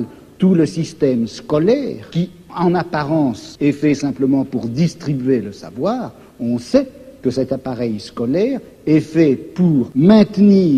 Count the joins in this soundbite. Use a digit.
3